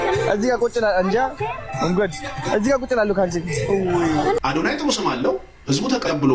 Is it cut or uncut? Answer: cut